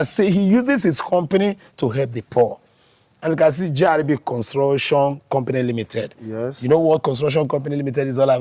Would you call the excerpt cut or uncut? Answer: uncut